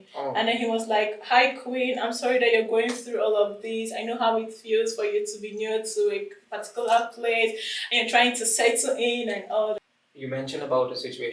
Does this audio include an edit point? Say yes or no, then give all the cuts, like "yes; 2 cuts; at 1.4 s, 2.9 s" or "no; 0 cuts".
yes; 1 cut; at 9.8 s